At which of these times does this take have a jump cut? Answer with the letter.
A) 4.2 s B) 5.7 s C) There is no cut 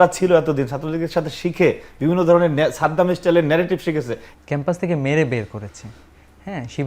A